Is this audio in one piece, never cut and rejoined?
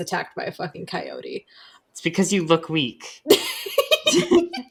yes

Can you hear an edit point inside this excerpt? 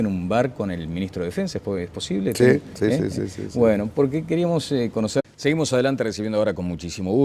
no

